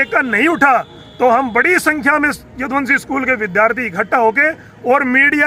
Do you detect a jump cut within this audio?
no; 0 cuts

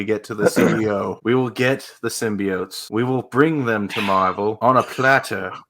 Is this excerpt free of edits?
no; 3 cuts; at 1.2 s, 2.8 s, 4.6 s

